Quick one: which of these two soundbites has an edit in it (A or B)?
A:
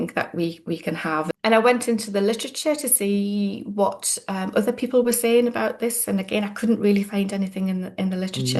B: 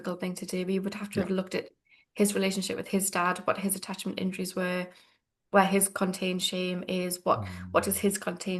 A